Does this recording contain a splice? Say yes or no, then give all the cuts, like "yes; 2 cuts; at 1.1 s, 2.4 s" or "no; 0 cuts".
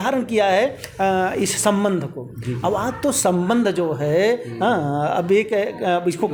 no; 0 cuts